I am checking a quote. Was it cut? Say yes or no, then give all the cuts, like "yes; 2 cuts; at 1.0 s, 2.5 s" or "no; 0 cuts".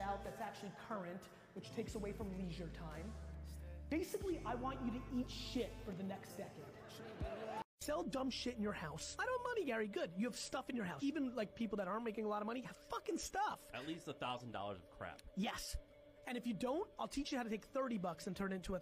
yes; 1 cut; at 7.6 s